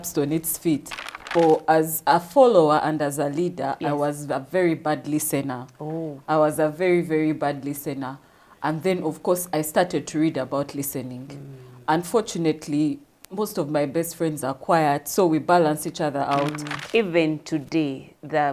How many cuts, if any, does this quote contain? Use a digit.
2